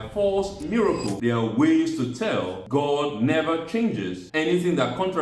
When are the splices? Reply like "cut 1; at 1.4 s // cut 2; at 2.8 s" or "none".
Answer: cut 1; at 1.1 s // cut 2; at 2.6 s // cut 3; at 4.2 s

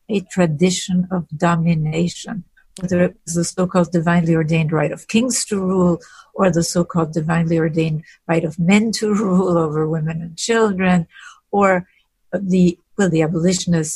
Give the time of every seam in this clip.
none

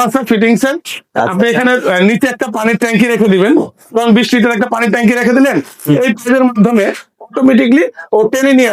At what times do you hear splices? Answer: none

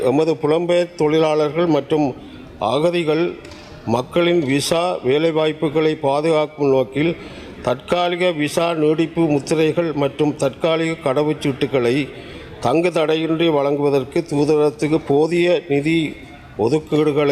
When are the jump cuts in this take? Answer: none

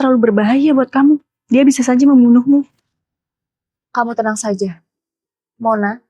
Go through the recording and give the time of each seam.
cut 1; at 1.3 s

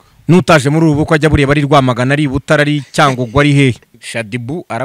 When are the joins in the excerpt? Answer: cut 1; at 3.9 s

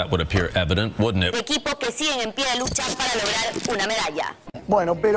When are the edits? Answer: none

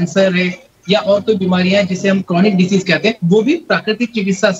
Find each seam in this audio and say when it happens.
cut 1; at 3.2 s

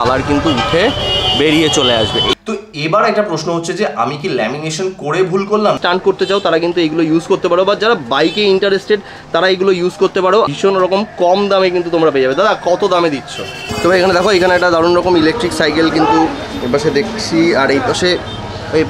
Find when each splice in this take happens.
cut 1; at 2.4 s // cut 2; at 5.8 s // cut 3; at 10.5 s // cut 4; at 13.7 s

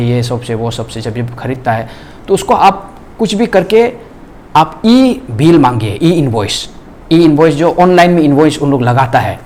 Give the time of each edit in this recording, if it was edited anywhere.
none

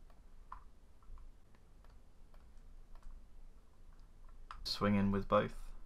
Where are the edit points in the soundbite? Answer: cut 1; at 1.9 s // cut 2; at 4.7 s

